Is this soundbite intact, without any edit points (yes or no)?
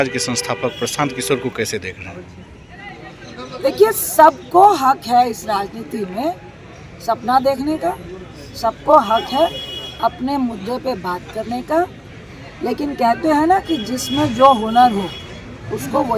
yes